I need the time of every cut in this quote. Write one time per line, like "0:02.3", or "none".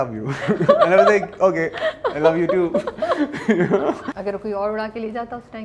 0:04.1